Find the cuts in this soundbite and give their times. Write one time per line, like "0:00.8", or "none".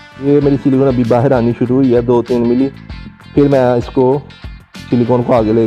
none